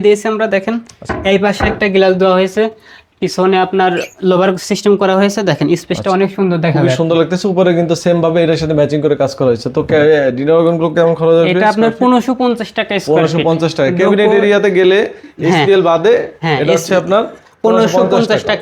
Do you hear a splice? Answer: no; 0 cuts

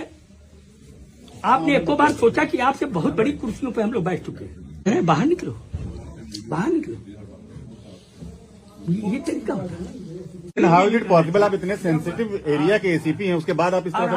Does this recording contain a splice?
yes; 2 cuts; at 4.9 s, 10.6 s

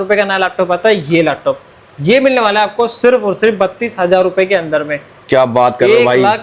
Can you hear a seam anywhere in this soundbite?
no; 0 cuts

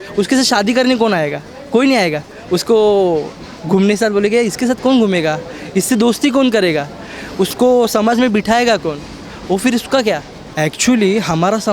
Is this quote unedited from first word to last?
yes; 0 cuts

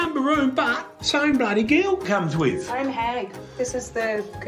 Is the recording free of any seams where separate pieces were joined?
yes; 0 cuts

